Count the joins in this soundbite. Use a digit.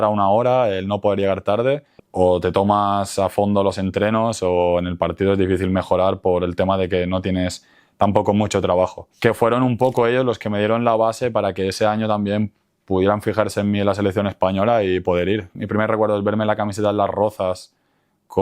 3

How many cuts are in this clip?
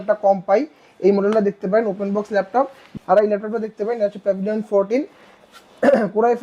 1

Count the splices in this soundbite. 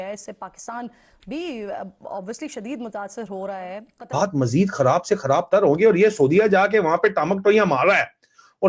1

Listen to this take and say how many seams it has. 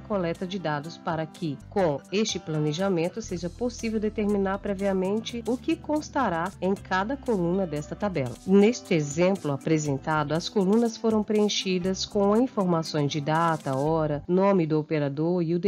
5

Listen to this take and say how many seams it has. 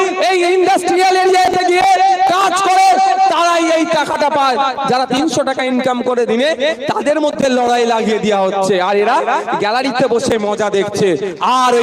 0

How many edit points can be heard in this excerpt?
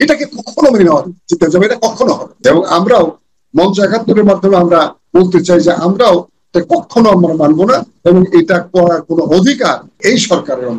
2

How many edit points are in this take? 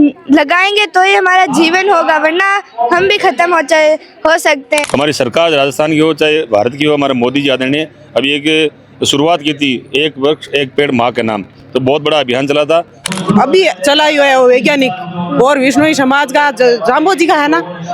2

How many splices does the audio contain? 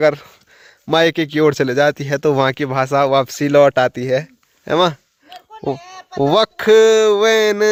0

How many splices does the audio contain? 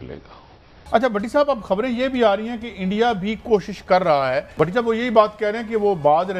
2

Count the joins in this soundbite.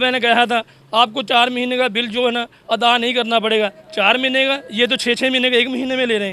0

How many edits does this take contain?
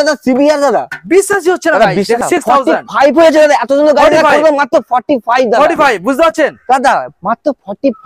1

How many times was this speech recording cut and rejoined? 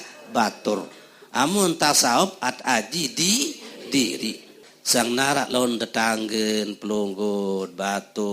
1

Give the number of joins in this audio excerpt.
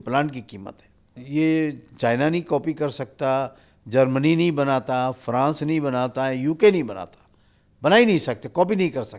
1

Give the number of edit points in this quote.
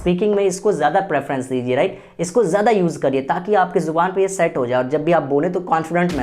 0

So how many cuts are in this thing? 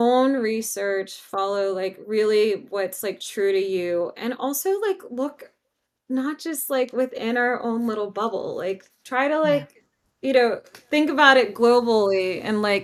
0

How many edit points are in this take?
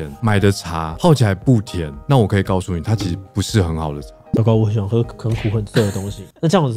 1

